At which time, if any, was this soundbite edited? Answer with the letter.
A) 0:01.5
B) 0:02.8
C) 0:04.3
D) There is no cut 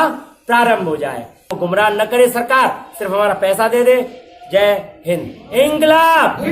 A